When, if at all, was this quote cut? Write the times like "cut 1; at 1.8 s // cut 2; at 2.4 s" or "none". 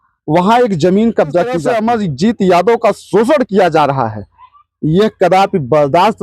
cut 1; at 1.6 s

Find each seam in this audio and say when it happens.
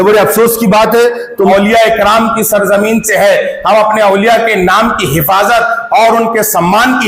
cut 1; at 1.5 s

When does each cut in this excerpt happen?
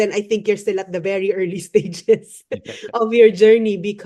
none

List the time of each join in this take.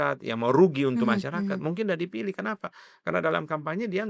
none

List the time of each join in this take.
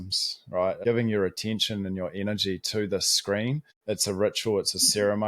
cut 1; at 0.8 s // cut 2; at 3.7 s

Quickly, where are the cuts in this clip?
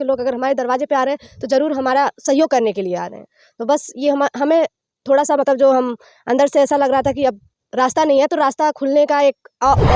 none

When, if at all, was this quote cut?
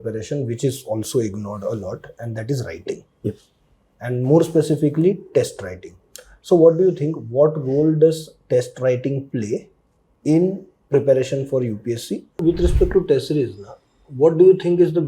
cut 1; at 12.4 s

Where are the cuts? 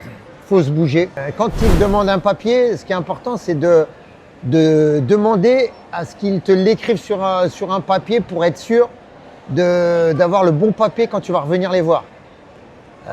cut 1; at 1.2 s

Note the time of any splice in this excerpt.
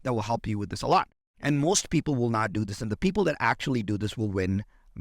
cut 1; at 1.2 s

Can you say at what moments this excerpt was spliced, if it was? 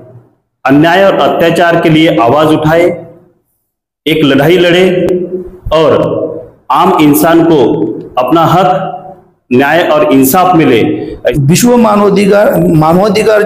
cut 1; at 11.3 s

